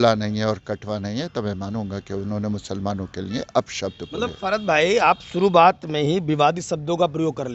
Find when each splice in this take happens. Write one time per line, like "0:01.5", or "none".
none

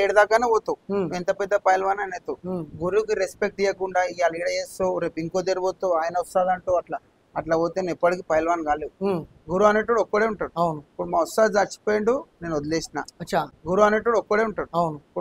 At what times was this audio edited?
0:13.6

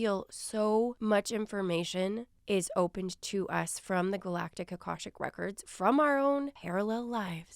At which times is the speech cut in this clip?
0:01.0
0:02.3
0:06.6

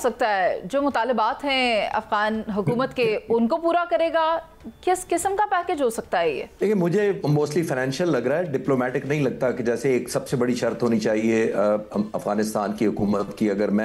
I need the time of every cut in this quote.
none

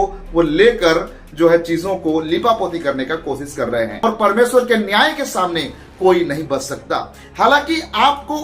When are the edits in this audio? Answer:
0:04.0

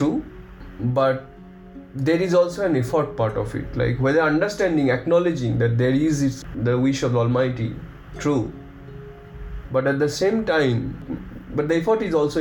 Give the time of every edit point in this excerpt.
none

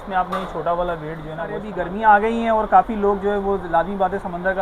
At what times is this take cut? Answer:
0:01.7

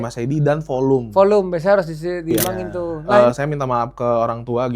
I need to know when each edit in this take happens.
0:03.0

